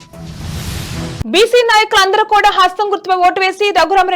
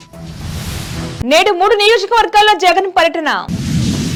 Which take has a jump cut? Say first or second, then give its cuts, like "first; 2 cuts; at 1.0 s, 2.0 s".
first; 1 cut; at 1.1 s